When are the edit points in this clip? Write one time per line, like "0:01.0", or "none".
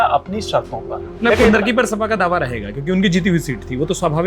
0:01.1